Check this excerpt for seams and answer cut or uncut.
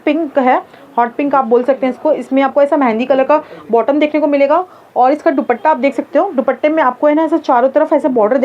uncut